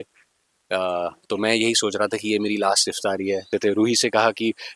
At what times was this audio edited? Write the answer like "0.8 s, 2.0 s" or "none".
3.5 s